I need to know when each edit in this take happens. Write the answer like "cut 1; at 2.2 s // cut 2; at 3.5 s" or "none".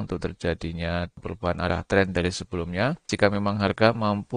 cut 1; at 1.2 s // cut 2; at 3.1 s